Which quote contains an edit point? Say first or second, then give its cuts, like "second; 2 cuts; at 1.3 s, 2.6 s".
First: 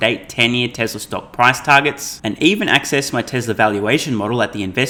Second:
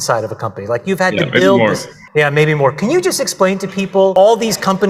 second; 2 cuts; at 1.9 s, 4.1 s